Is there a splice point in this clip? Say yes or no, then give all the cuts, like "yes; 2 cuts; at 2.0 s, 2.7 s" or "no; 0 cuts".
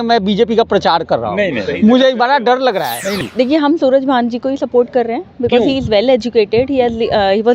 yes; 1 cut; at 3.2 s